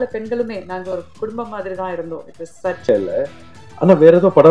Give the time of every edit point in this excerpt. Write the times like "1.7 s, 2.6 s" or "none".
2.9 s

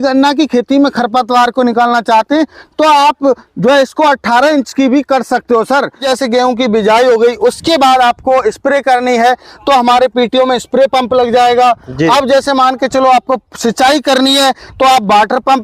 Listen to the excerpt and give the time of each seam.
6.0 s

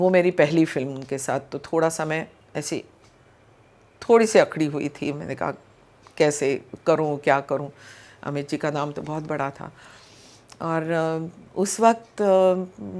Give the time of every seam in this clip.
none

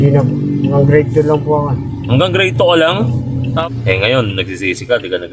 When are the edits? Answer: 3.6 s

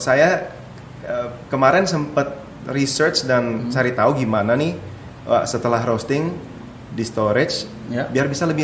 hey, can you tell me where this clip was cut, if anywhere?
none

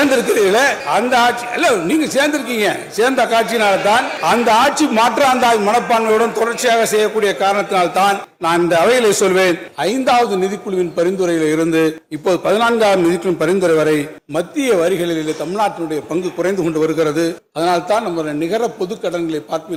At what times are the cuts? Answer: none

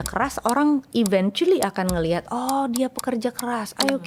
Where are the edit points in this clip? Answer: none

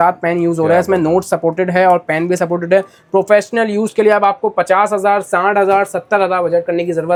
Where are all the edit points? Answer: none

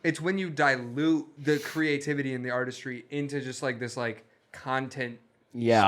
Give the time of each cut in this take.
1.3 s

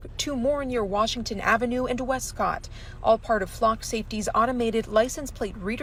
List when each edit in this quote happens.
none

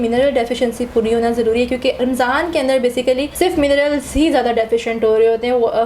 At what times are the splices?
2.0 s, 3.3 s

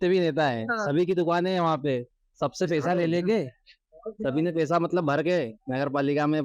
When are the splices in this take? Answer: 2.2 s

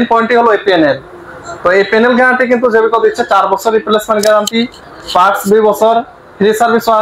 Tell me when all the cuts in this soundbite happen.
none

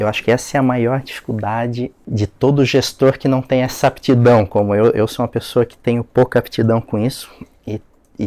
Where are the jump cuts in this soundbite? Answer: 2.0 s

